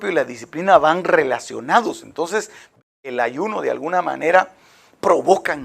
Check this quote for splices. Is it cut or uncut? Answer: cut